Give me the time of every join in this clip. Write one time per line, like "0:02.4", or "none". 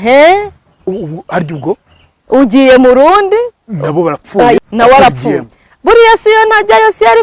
0:04.6